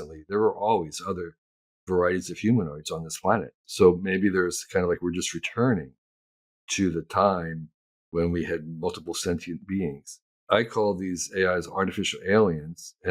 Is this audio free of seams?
no; 2 cuts; at 3.6 s, 10.3 s

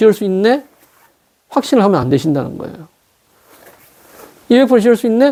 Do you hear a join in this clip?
no; 0 cuts

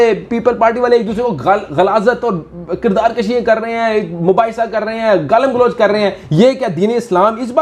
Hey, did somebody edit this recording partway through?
no; 0 cuts

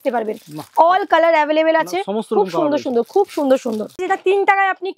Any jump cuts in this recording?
yes; 1 cut; at 4.0 s

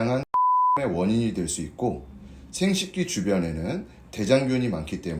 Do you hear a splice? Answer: no; 0 cuts

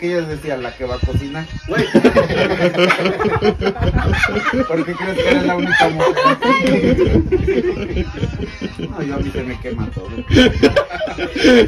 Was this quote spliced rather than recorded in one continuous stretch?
no; 0 cuts

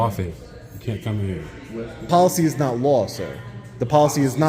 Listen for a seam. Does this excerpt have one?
yes; 1 cut; at 2.1 s

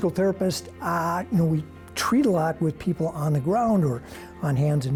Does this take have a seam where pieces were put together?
no; 0 cuts

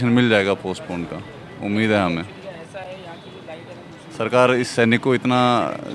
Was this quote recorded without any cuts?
yes; 0 cuts

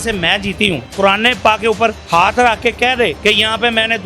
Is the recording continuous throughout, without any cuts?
no; 3 cuts; at 0.9 s, 2.0 s, 3.2 s

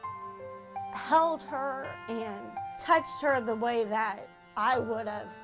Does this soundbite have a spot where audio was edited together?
no; 0 cuts

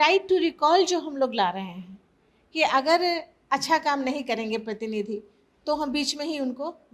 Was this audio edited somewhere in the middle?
no; 0 cuts

